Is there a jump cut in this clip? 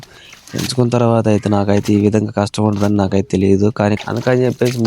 yes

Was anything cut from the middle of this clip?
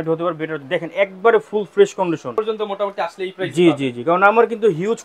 yes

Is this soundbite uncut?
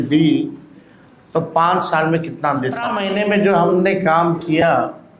no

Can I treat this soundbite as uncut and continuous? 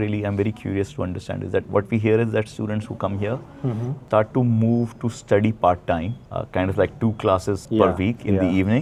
yes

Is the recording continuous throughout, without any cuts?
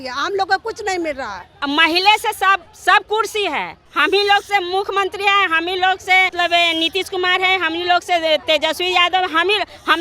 no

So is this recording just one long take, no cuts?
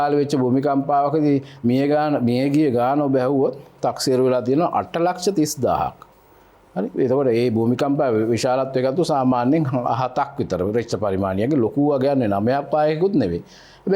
yes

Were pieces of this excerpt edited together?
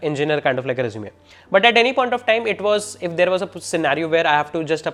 no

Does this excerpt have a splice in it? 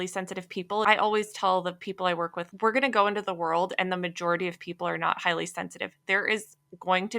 yes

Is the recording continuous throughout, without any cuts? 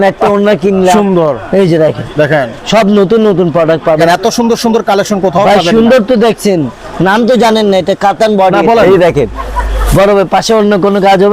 no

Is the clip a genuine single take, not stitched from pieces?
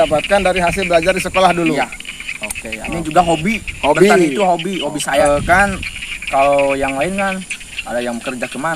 no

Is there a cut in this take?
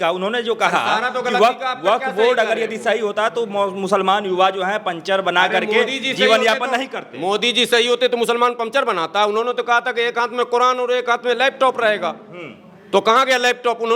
no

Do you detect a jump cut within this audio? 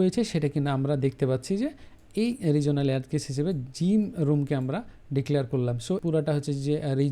yes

